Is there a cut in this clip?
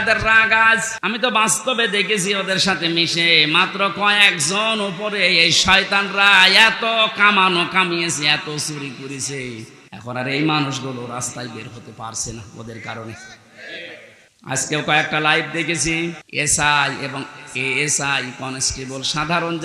yes; 4 cuts; at 0.9 s, 9.8 s, 14.2 s, 16.2 s

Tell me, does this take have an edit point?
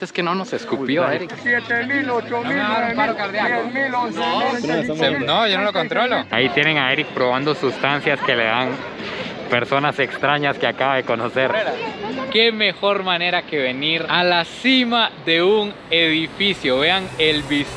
yes; 4 cuts; at 1.3 s, 4.6 s, 6.3 s, 12.3 s

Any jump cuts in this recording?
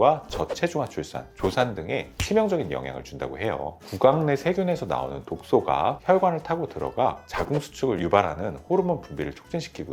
no; 0 cuts

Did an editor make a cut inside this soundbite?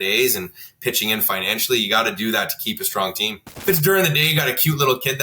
yes; 1 cut; at 3.5 s

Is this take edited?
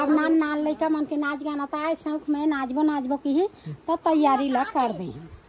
no; 0 cuts

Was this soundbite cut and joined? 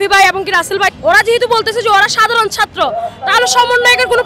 yes; 1 cut; at 0.9 s

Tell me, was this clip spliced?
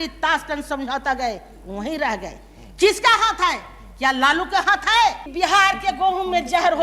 yes; 1 cut; at 5.3 s

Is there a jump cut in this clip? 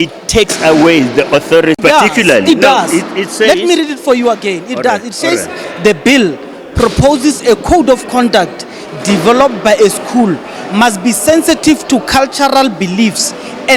yes; 1 cut; at 1.8 s

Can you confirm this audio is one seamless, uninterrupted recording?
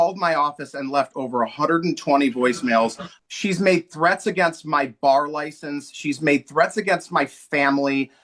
no; 1 cut; at 3.1 s

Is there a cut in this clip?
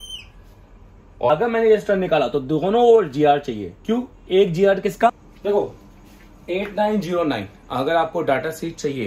yes; 2 cuts; at 1.3 s, 5.3 s

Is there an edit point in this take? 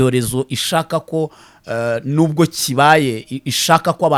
no; 0 cuts

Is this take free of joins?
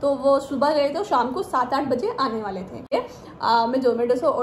no; 1 cut; at 2.9 s

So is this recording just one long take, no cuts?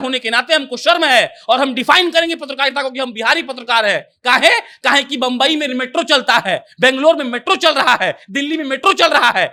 yes; 0 cuts

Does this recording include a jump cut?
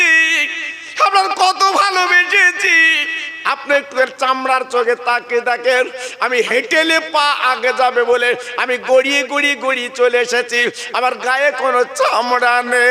no; 0 cuts

